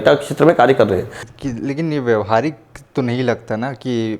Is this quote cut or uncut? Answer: cut